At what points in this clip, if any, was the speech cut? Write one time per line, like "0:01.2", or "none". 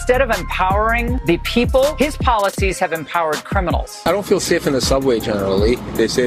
0:01.1
0:01.9
0:04.0